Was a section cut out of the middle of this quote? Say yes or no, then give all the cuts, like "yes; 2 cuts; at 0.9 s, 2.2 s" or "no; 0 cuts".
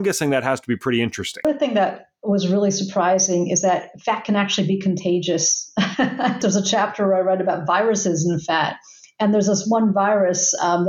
yes; 2 cuts; at 1.4 s, 6.4 s